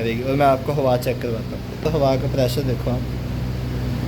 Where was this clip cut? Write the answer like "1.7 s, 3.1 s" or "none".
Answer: 1.8 s